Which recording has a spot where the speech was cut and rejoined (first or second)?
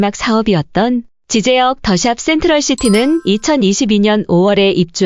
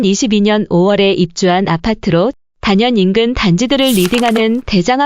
second